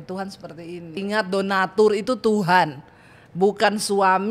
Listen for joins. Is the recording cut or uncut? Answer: cut